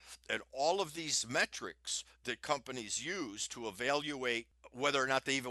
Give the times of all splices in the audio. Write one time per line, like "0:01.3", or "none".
0:04.6